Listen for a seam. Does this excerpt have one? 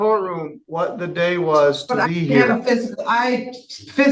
no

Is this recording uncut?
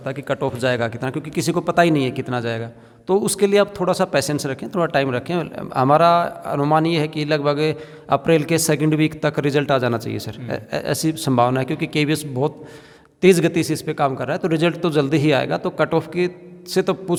yes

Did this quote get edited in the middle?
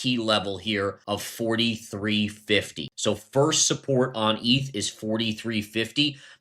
yes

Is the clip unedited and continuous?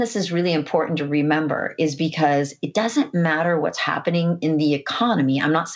yes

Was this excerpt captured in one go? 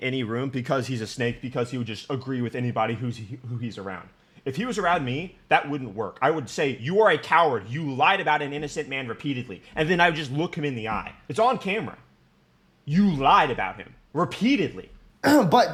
yes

